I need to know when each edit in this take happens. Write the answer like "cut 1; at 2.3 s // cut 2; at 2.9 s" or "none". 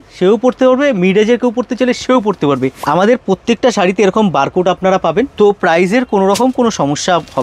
cut 1; at 2.8 s // cut 2; at 5.3 s